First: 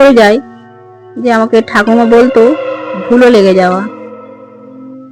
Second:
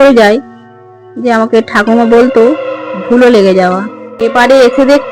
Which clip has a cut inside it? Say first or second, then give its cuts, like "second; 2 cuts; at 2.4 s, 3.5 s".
second; 1 cut; at 4.0 s